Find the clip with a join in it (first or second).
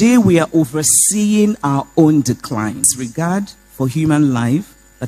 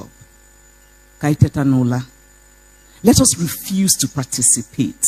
first